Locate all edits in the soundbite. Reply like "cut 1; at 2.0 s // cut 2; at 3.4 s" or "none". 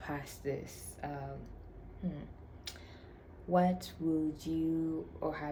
none